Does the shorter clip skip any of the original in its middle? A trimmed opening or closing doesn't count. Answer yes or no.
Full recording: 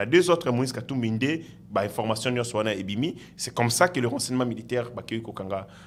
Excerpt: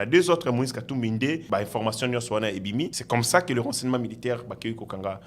yes